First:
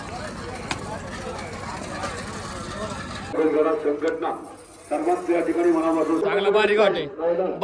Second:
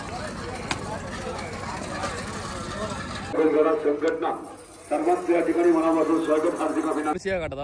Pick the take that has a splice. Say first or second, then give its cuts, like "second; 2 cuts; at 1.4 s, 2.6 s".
first; 1 cut; at 6.2 s